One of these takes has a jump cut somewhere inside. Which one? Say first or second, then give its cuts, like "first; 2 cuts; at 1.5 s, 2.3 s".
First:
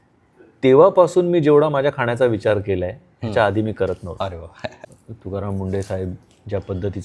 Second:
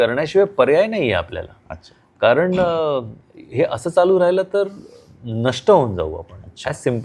first; 1 cut; at 4.8 s